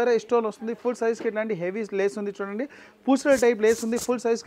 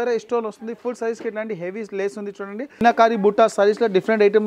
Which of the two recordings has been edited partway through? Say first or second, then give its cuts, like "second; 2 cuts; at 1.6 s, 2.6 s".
second; 1 cut; at 2.8 s